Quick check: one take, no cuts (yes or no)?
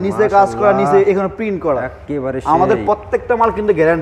yes